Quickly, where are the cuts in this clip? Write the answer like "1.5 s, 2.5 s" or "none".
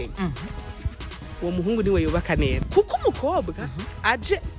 2.6 s